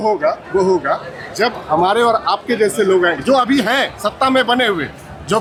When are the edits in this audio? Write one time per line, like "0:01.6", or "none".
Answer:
none